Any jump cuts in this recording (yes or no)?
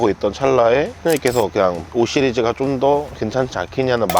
yes